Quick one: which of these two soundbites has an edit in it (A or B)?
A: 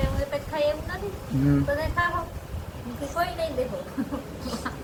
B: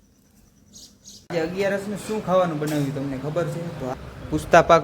B